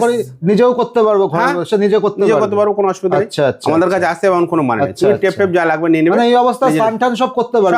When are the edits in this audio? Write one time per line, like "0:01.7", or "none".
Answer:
none